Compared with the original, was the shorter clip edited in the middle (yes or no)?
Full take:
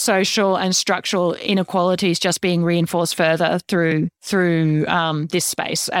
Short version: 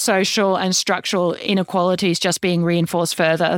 no